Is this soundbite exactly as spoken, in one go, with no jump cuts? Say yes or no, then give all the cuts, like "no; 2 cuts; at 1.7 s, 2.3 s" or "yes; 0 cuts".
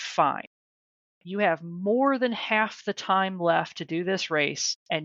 yes; 0 cuts